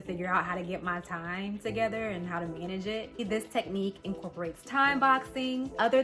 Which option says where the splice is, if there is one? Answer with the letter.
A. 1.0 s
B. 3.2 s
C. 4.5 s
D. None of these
B